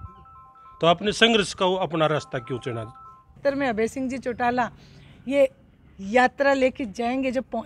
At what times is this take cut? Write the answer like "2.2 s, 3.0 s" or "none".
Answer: 3.4 s